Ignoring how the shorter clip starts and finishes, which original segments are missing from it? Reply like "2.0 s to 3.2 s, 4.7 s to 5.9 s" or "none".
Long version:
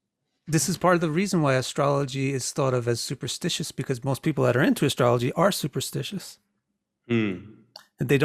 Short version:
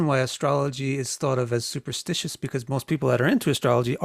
none